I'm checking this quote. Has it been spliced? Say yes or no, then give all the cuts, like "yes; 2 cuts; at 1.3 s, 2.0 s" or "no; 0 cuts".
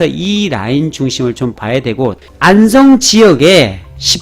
yes; 1 cut; at 2.2 s